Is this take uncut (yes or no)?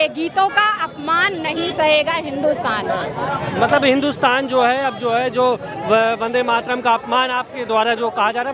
yes